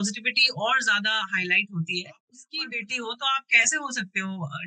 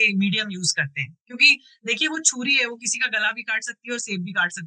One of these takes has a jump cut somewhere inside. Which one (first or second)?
first